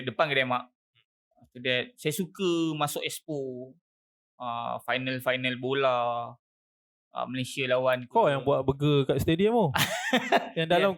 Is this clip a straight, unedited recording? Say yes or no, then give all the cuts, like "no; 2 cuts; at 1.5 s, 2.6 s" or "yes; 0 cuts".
yes; 0 cuts